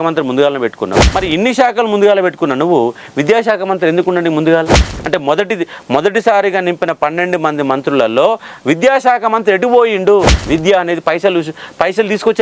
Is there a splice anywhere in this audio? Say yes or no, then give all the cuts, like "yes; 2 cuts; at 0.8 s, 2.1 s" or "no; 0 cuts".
yes; 2 cuts; at 1.1 s, 10.4 s